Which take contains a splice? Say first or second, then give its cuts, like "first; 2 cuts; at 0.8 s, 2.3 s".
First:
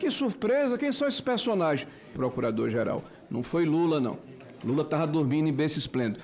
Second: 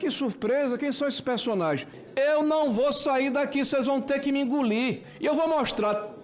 second; 2 cuts; at 2.0 s, 5.1 s